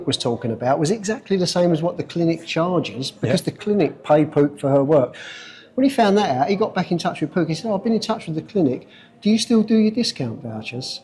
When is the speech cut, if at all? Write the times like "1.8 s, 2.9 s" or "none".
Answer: none

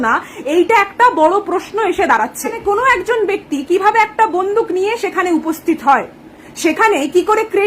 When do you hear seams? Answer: 2.6 s

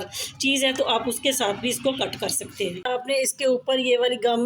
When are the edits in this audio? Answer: 2.8 s

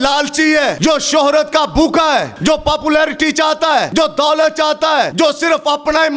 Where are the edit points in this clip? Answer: 0.8 s, 2.3 s, 3.9 s, 5.1 s

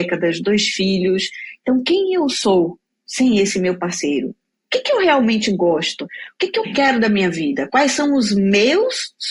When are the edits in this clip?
none

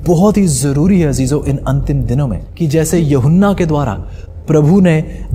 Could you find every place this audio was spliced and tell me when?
2.4 s

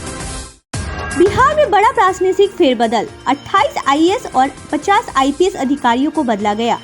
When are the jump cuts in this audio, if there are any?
none

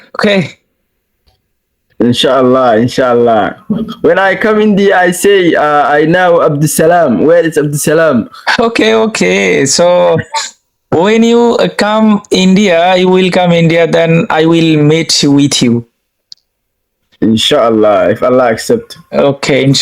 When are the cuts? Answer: none

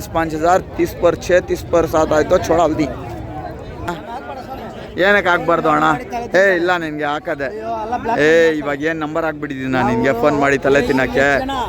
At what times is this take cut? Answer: 3.9 s

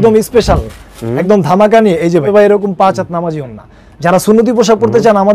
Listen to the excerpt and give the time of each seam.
2.3 s

